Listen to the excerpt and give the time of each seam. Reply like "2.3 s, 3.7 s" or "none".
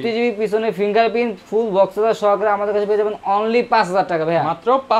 none